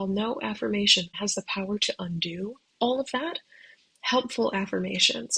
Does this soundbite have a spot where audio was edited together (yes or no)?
yes